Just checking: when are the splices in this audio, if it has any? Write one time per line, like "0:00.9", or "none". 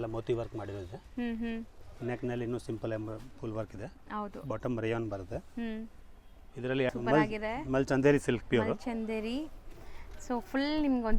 0:06.9